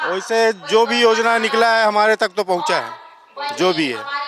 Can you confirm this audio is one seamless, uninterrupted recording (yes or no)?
yes